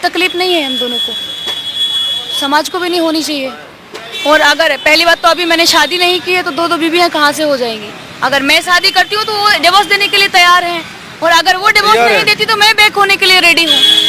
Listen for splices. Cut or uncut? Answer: uncut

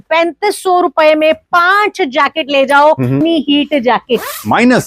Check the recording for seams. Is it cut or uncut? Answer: cut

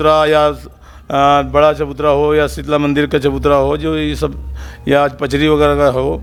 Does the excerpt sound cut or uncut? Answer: uncut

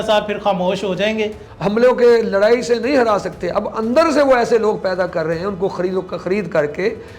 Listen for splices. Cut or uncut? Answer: cut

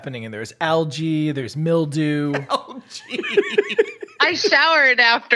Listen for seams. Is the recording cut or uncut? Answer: uncut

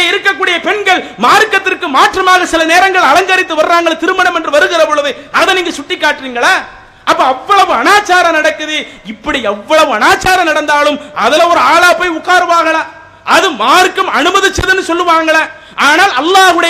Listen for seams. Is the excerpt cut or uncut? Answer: uncut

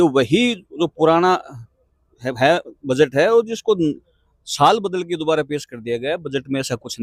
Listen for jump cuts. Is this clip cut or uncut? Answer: uncut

